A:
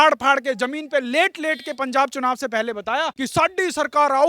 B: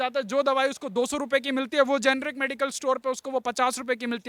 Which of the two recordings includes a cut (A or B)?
A